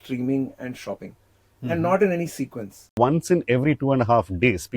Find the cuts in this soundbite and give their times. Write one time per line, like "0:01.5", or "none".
0:02.9

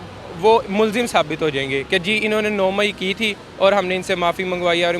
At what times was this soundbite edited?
none

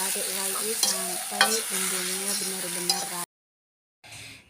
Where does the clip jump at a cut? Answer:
0:03.2

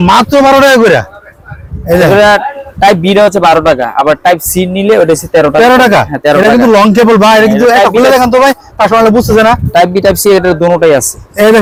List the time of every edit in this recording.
none

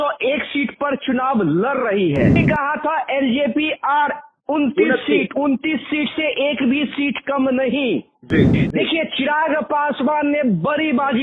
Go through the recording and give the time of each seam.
0:02.4
0:08.6

